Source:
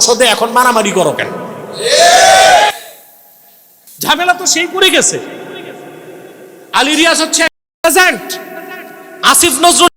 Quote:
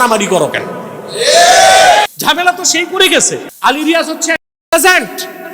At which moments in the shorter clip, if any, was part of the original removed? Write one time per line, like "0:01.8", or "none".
0:02.2
0:03.5